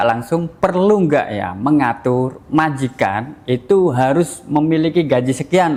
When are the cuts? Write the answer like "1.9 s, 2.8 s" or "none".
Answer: none